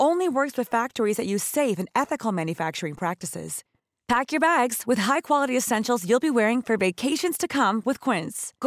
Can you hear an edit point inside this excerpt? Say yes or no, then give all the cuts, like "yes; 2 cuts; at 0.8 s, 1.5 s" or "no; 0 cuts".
no; 0 cuts